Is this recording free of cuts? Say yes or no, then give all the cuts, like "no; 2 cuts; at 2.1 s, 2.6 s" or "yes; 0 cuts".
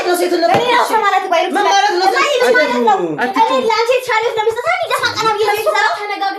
yes; 0 cuts